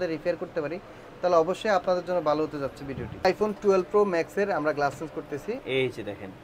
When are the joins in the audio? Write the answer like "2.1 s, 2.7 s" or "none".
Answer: 3.2 s, 5.6 s